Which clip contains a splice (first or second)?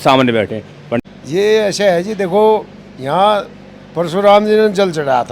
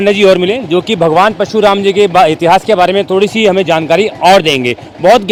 first